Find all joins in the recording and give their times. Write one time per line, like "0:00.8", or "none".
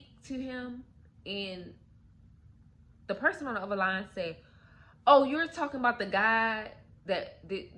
none